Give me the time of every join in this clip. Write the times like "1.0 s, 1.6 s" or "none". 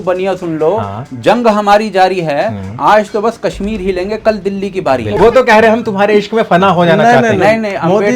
5.1 s